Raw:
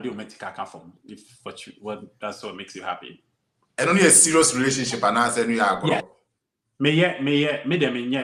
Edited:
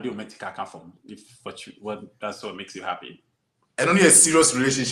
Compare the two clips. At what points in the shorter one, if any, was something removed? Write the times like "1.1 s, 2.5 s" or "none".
none

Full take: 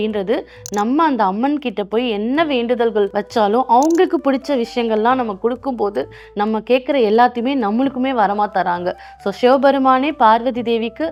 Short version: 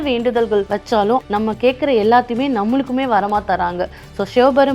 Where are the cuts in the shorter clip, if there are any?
1.2 s

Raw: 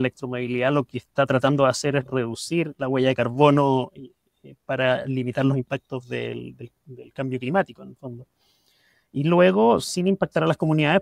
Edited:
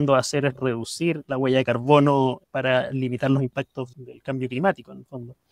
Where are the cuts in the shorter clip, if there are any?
2.4 s, 3.9 s

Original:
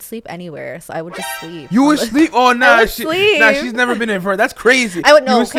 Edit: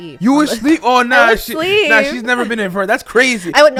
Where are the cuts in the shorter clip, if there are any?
none

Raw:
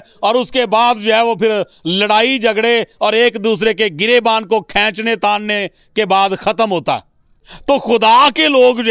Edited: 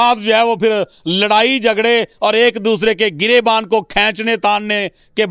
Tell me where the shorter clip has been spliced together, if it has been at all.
none

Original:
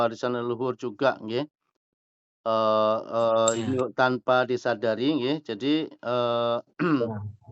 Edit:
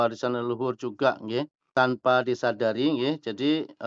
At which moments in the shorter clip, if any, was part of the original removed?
1.7 s

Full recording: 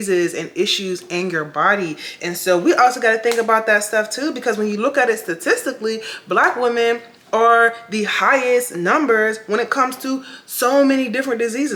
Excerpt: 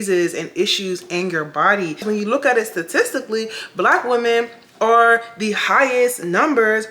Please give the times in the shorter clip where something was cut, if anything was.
2.0 s

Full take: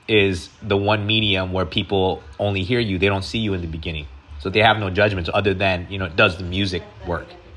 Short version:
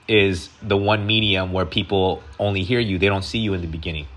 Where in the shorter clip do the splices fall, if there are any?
none

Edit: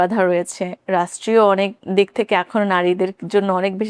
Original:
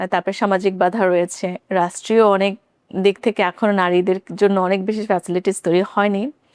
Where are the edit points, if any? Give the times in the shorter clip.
1.8 s

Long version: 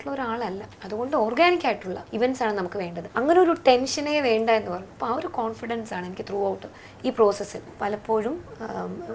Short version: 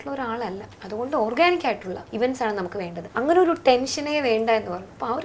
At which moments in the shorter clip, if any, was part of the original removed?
none

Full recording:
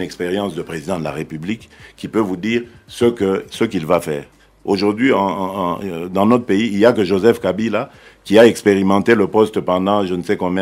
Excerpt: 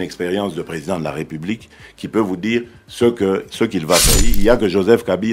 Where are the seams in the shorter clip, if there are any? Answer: 4.3 s

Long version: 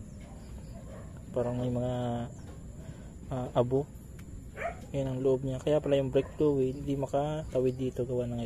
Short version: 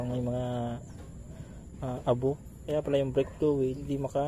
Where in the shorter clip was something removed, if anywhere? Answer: 2.6 s

